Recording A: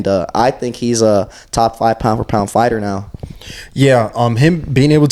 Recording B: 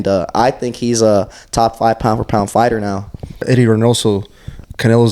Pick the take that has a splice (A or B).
B